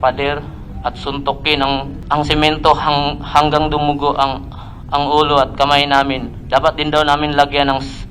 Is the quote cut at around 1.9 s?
yes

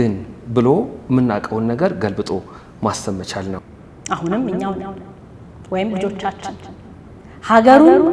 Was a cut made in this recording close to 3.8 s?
yes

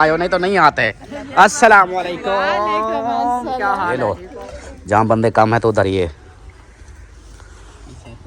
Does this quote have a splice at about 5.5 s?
no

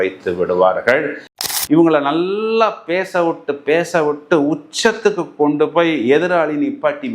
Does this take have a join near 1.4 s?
yes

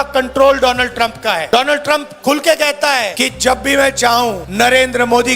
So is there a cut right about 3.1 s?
yes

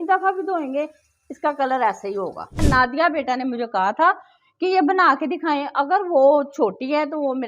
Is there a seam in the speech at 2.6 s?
yes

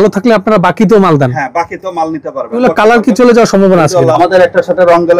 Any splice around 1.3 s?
no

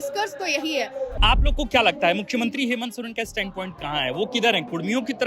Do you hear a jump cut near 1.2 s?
yes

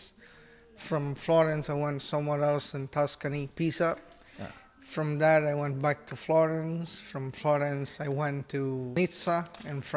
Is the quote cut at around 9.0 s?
yes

